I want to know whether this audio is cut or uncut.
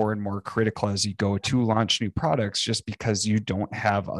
uncut